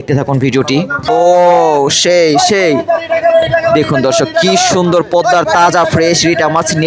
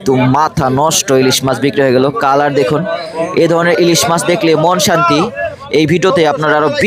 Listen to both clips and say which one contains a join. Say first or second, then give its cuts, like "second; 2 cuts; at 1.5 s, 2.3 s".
first; 1 cut; at 1.1 s